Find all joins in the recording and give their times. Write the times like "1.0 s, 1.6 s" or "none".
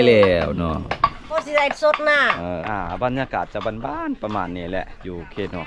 1.3 s, 2.6 s